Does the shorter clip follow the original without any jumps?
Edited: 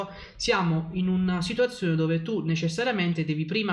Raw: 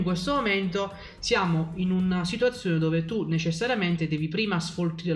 yes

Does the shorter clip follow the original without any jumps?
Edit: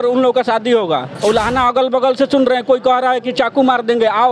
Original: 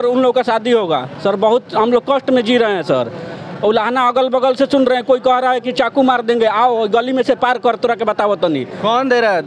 no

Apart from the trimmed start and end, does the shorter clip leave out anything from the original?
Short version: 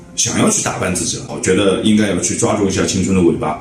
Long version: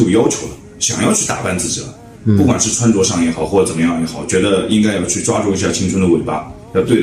yes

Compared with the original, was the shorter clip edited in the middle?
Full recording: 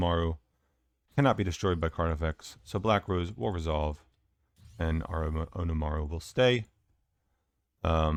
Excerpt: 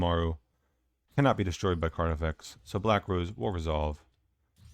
no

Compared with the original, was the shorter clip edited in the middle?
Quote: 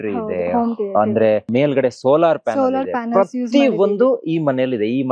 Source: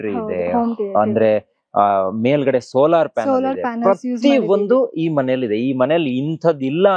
yes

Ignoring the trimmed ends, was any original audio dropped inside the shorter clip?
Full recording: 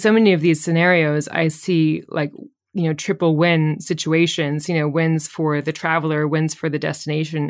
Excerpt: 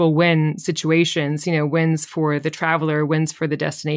no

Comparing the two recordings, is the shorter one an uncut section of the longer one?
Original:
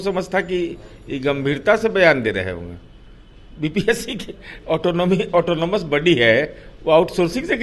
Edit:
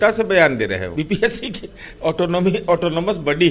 no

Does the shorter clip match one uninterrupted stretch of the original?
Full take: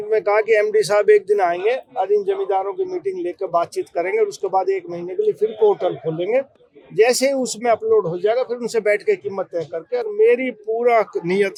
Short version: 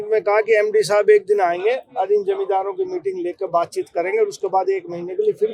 yes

